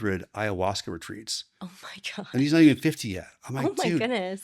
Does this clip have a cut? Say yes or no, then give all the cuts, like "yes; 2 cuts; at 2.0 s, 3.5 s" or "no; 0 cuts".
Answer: no; 0 cuts